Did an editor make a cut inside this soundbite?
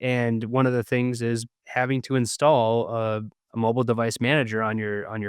yes; 2 cuts; at 1.6 s, 3.4 s

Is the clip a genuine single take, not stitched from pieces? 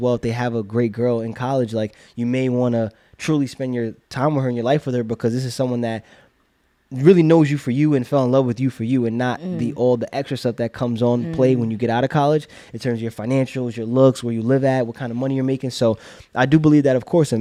yes; 0 cuts

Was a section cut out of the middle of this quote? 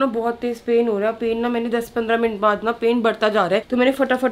no; 0 cuts

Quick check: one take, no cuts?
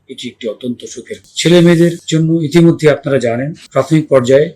no; 3 cuts; at 1.3 s, 2.0 s, 3.6 s

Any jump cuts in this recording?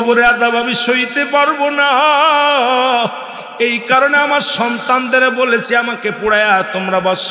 no; 0 cuts

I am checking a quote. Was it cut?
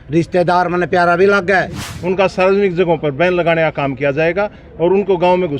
yes; 1 cut; at 1.8 s

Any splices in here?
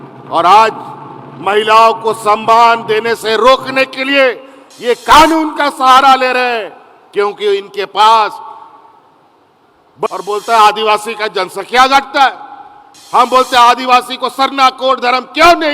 yes; 1 cut; at 10.1 s

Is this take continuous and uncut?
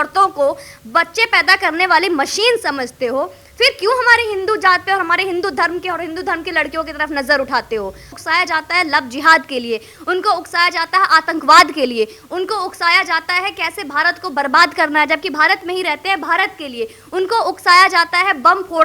no; 1 cut; at 8.1 s

